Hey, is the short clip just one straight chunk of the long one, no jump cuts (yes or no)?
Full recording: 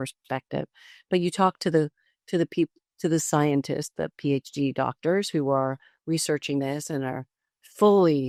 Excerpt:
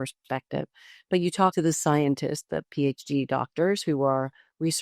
no